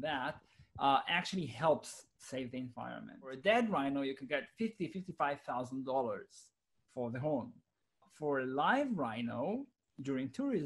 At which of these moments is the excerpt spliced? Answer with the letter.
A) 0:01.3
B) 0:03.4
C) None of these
B